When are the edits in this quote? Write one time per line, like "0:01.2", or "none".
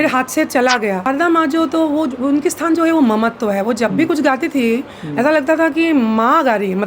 0:01.1